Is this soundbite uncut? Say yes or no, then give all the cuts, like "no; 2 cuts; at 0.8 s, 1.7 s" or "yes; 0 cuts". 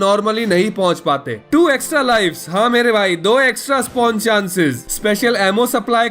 no; 2 cuts; at 1.3 s, 4.8 s